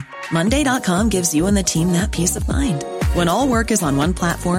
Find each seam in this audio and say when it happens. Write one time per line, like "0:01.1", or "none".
none

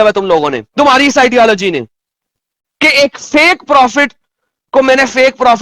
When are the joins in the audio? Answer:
0:02.1

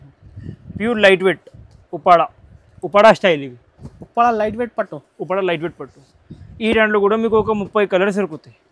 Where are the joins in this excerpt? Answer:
none

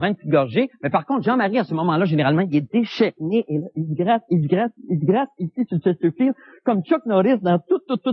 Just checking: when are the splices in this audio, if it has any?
0:05.7

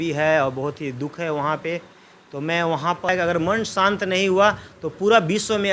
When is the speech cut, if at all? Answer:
0:03.1

